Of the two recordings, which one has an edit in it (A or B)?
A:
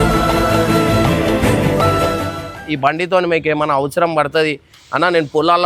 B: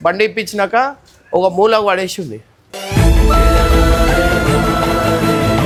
A